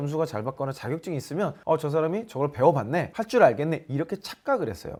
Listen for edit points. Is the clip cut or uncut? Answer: uncut